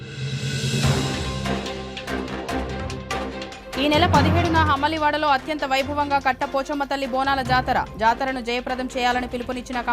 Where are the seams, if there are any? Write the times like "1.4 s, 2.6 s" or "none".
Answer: 1.5 s